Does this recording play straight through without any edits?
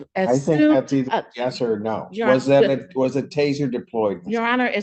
yes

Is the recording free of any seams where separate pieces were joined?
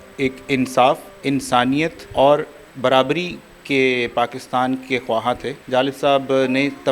no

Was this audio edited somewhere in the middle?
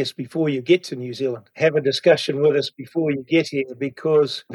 yes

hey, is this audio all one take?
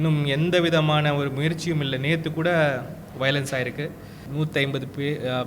no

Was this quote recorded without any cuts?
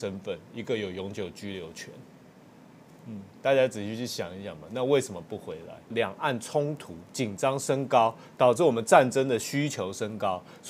no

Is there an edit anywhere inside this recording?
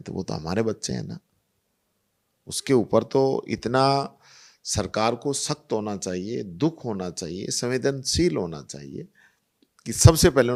no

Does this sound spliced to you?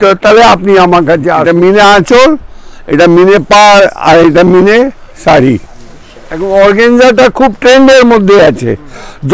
yes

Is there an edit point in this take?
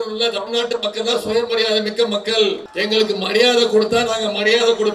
yes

